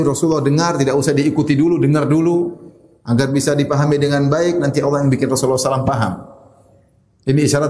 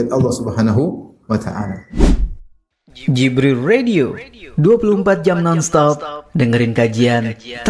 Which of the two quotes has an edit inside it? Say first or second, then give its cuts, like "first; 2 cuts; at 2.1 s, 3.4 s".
second; 1 cut; at 1.9 s